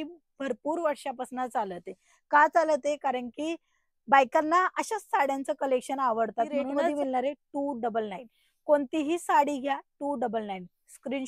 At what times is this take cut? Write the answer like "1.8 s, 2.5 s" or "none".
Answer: 6.9 s